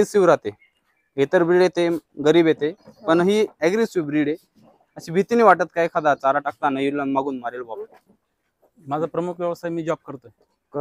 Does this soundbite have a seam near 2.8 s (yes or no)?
no